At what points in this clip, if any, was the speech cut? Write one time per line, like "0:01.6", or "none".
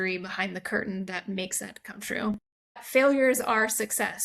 0:02.8

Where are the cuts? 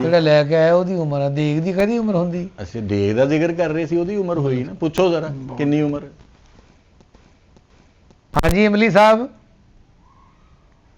none

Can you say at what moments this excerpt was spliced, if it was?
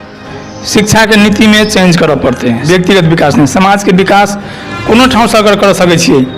0:02.7

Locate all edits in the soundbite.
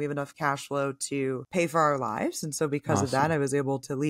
none

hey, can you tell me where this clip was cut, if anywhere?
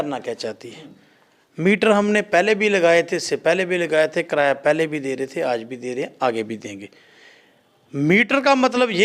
none

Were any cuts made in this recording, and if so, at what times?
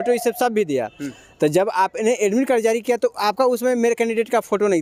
none

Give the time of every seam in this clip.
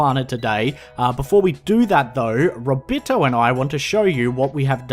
0:01.4

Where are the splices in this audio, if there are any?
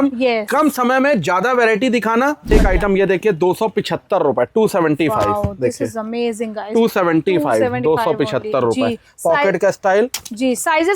0:02.5

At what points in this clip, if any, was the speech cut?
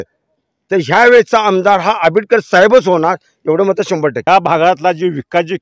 0:04.2

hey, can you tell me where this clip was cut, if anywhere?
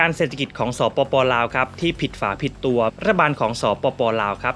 0:02.9

